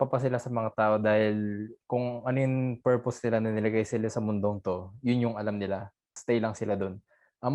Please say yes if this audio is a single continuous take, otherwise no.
no